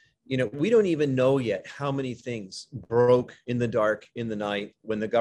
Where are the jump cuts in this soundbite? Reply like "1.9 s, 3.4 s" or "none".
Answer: none